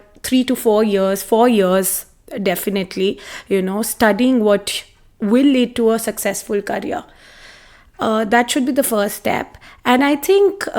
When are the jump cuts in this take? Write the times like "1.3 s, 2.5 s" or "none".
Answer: none